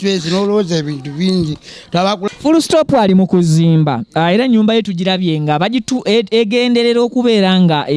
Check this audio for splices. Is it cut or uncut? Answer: cut